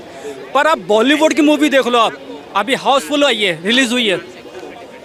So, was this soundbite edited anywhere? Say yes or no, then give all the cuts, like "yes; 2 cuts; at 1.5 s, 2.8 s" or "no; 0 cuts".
no; 0 cuts